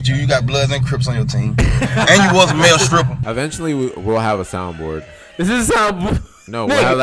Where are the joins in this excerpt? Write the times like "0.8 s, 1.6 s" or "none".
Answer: 3.2 s